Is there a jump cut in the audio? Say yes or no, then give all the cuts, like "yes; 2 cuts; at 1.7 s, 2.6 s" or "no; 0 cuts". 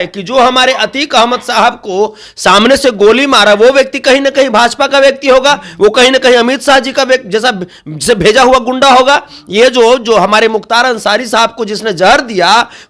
no; 0 cuts